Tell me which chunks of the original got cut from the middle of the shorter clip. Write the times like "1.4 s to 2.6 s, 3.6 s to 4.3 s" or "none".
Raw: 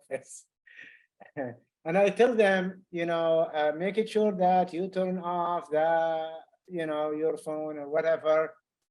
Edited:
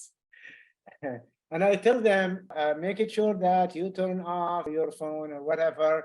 2.9 s to 3.5 s, 5.7 s to 7.1 s